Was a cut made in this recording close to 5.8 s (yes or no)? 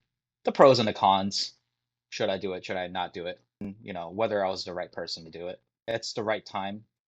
yes